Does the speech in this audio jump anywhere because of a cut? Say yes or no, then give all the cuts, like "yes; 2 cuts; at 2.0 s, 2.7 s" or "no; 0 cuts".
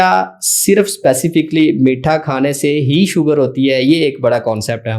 no; 0 cuts